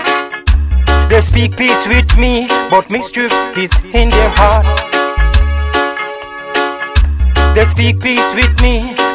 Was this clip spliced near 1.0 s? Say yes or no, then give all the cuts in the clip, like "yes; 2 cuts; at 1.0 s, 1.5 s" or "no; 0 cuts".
yes; 1 cut; at 1.0 s